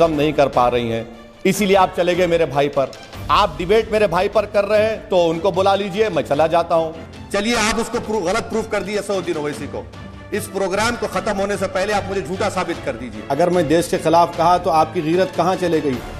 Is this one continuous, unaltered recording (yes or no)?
no